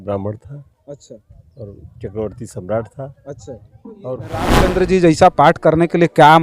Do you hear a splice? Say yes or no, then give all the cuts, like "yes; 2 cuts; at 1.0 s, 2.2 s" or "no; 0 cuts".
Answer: yes; 1 cut; at 4.2 s